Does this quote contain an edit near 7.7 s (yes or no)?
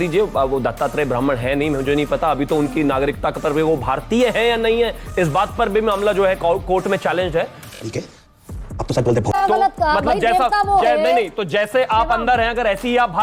no